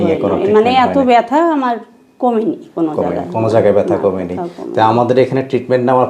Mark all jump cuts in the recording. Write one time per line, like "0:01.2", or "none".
none